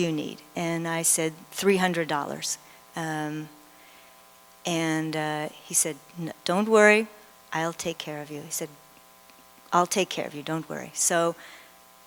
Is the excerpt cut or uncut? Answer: uncut